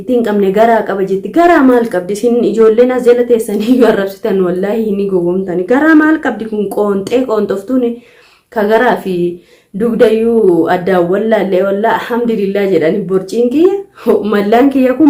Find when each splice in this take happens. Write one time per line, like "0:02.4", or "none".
none

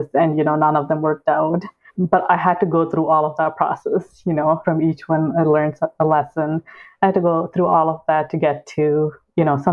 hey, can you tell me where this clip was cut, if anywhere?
0:01.9
0:04.6

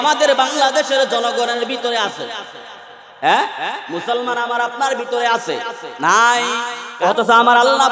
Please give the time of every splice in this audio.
0:06.8

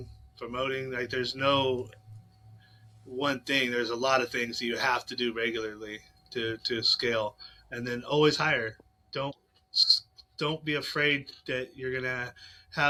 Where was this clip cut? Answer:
none

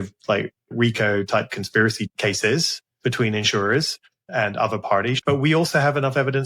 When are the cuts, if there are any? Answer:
0:02.1
0:04.2
0:05.2

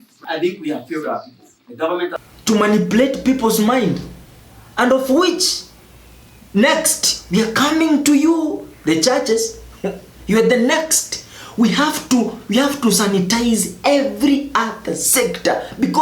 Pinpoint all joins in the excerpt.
0:02.2

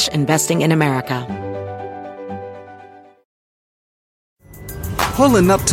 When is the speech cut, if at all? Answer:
0:01.2

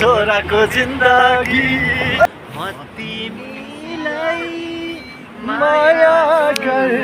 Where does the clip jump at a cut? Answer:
0:02.2

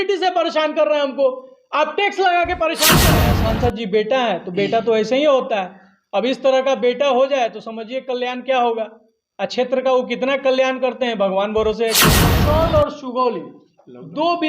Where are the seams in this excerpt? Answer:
0:03.1
0:12.3

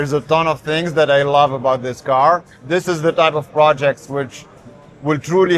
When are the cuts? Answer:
0:02.5

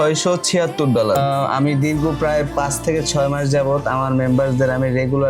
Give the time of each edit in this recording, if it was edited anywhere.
0:01.2

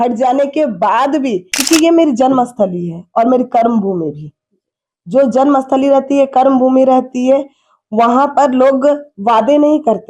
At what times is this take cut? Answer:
0:01.5

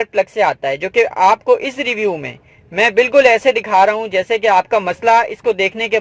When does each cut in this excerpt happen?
none

